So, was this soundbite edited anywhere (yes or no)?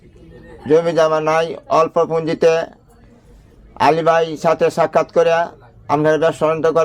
no